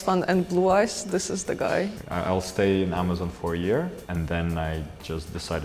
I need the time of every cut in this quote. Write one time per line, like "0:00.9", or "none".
0:02.0
0:04.0